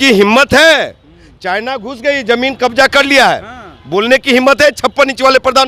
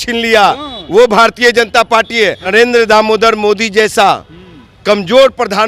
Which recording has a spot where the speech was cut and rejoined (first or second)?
second